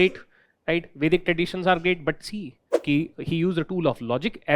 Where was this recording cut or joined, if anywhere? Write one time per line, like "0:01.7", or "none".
0:02.7